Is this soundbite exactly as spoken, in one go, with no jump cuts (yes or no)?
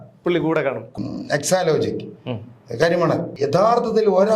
no